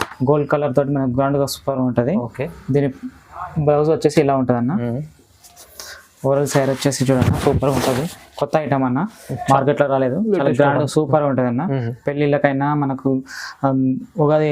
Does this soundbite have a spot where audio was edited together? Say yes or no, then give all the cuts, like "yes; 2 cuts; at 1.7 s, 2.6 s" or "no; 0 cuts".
no; 0 cuts